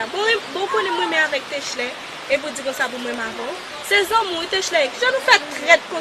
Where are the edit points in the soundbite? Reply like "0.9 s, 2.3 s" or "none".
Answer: none